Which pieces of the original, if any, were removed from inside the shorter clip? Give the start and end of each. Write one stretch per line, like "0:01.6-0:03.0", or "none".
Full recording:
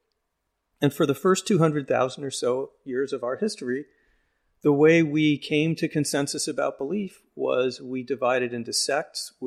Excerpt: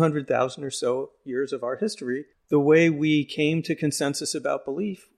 0:03.9-0:04.5